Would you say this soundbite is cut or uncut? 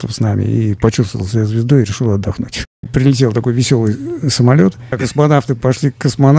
cut